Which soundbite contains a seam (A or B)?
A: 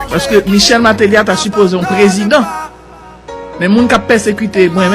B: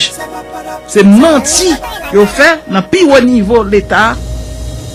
A